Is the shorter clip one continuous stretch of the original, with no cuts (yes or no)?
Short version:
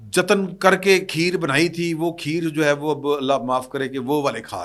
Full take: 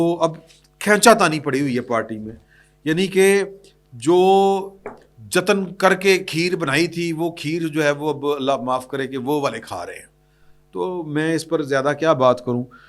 yes